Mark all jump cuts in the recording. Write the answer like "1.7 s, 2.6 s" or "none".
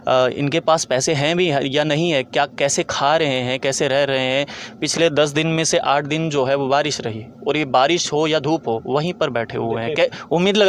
none